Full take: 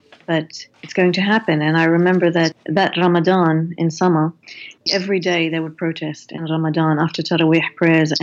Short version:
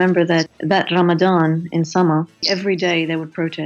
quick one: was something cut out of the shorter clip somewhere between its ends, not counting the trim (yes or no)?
yes